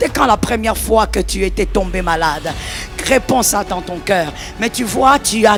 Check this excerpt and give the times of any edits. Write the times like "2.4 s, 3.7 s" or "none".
none